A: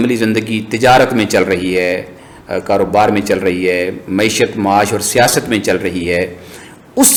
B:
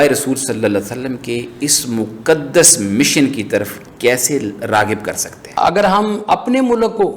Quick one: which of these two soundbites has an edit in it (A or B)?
B